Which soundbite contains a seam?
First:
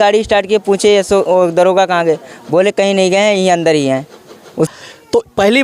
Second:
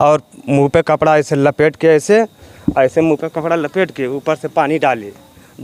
first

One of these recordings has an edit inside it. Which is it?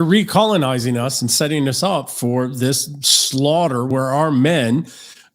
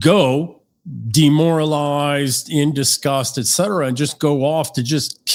first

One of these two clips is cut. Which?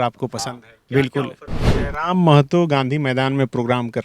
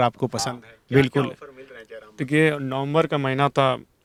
first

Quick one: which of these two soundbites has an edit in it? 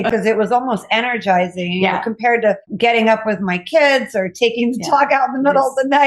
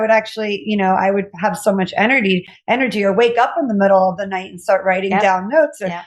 first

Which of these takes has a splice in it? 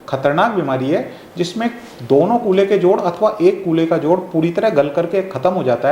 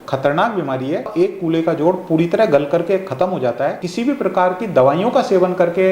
second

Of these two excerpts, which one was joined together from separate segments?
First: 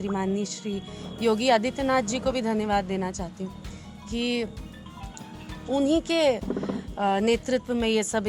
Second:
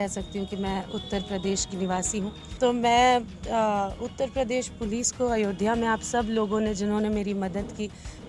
second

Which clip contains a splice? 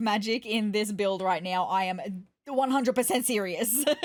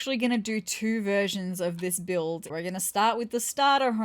second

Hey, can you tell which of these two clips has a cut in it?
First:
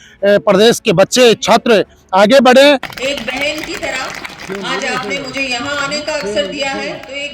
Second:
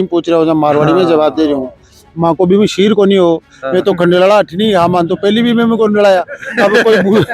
first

